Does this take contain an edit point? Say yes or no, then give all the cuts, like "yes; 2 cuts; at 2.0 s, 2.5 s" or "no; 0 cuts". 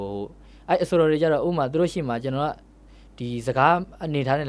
no; 0 cuts